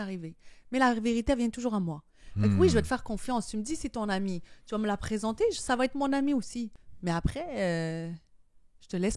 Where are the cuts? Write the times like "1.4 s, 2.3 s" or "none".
6.8 s